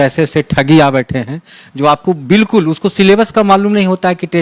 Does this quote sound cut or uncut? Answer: uncut